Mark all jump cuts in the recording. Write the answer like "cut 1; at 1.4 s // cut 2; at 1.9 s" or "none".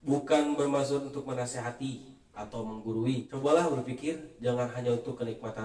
cut 1; at 3.3 s

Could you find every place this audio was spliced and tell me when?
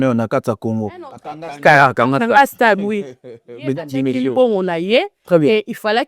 none

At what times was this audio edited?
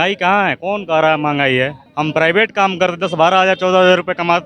cut 1; at 1.8 s

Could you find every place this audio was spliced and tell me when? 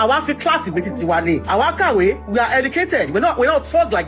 cut 1; at 1.4 s

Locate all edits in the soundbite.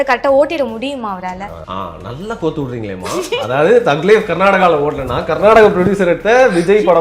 cut 1; at 1.5 s

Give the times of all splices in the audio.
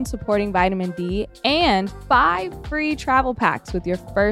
cut 1; at 2.0 s

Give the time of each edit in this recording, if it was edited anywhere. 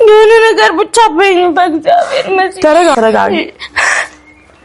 cut 1; at 2.9 s

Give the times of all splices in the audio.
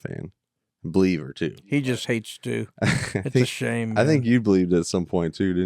cut 1; at 1.7 s

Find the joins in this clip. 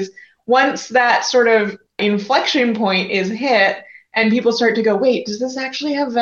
cut 1; at 2.0 s

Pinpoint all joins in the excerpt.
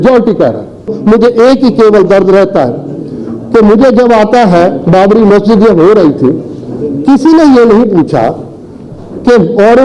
cut 1; at 0.9 s

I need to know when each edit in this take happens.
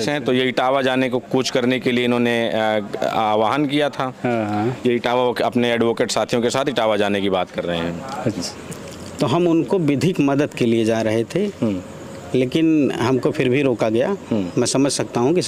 cut 1; at 8.4 s

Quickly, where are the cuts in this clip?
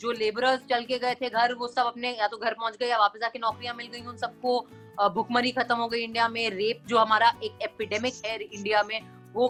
none

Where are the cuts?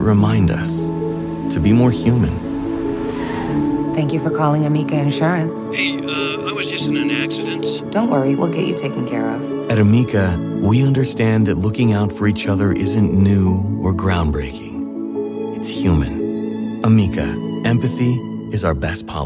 none

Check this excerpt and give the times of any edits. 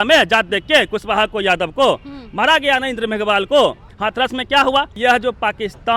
cut 1; at 3.9 s // cut 2; at 4.9 s

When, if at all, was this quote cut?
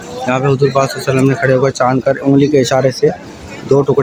none

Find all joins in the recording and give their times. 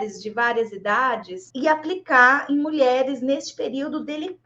cut 1; at 1.4 s

